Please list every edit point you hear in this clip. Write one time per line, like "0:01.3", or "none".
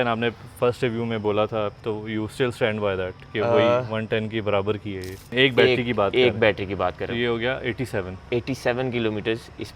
0:01.7
0:05.3

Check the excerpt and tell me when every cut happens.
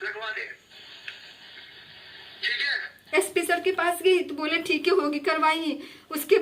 0:02.9

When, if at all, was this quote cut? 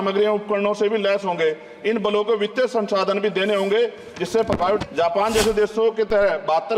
0:04.8

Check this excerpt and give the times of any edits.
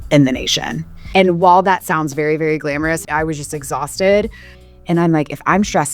0:00.9
0:03.0
0:04.6

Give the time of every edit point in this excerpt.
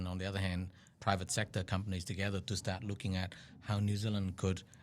0:00.9

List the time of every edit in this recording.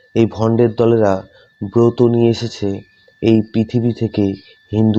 none

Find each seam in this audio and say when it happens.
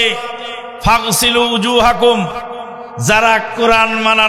none

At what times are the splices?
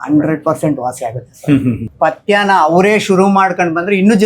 0:01.9

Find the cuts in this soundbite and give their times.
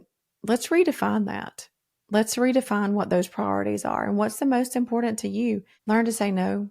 0:05.7

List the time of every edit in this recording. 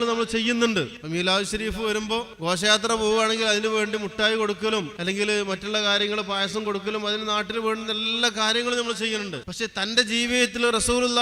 0:01.0
0:02.3
0:04.9
0:09.4

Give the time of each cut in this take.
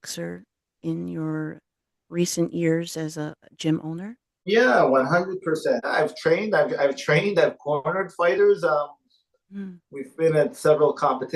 0:04.4
0:05.9

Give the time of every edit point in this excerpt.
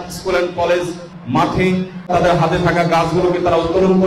0:01.2
0:02.1

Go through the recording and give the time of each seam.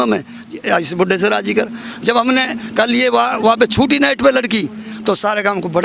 none

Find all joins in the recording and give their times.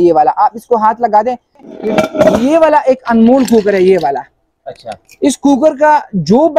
0:01.8

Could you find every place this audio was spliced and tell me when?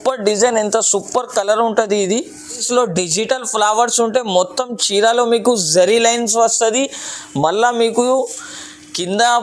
0:02.6

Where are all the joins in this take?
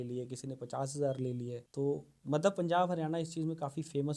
0:01.6

